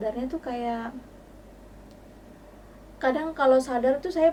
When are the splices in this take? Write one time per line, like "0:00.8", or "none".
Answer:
none